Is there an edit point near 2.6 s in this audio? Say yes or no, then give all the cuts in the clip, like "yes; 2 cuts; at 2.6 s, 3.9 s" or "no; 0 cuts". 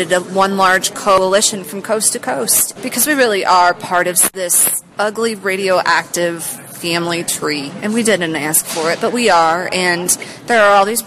yes; 3 cuts; at 1.2 s, 2.6 s, 4.3 s